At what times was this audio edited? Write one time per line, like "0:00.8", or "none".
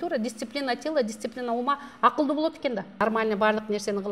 0:02.9